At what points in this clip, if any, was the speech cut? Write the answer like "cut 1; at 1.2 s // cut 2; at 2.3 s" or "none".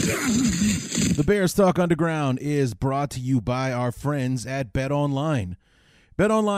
cut 1; at 1.1 s

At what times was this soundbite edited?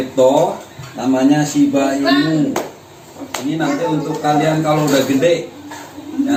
none

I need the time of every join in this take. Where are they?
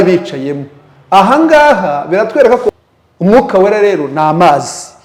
cut 1; at 2.7 s

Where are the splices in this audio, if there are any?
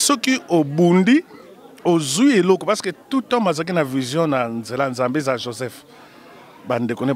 none

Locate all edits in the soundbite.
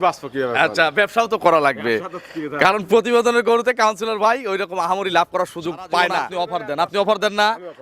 cut 1; at 6.4 s

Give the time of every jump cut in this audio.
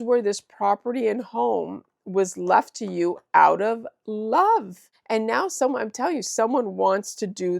cut 1; at 4.9 s

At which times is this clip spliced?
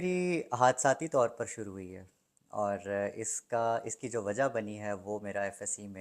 none

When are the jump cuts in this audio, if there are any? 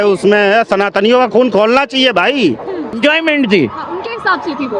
cut 1; at 3.0 s

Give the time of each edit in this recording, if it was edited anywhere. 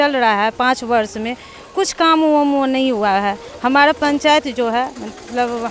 none

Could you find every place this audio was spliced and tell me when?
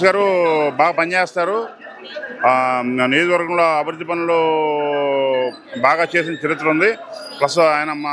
none

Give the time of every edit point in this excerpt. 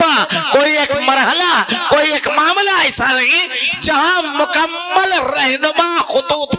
none

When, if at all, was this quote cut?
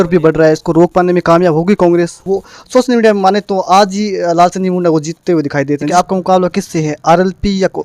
cut 1; at 2.2 s // cut 2; at 5.8 s

